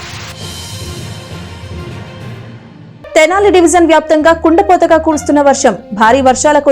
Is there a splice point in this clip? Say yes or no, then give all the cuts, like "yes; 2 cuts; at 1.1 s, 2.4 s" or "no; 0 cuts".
yes; 1 cut; at 2.9 s